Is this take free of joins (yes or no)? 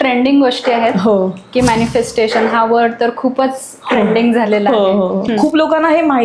no